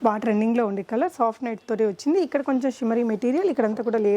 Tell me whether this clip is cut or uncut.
uncut